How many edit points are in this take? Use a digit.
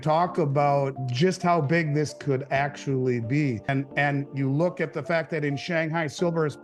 2